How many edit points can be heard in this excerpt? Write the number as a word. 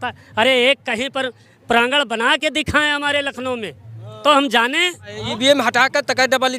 one